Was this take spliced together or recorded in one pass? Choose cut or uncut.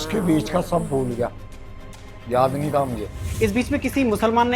cut